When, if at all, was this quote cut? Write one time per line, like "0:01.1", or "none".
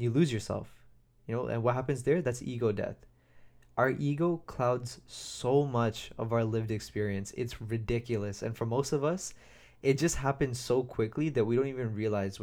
none